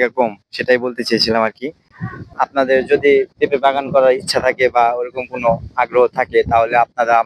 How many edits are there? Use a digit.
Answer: 1